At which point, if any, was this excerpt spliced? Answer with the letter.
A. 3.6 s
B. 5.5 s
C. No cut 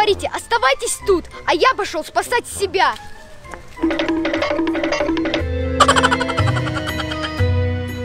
B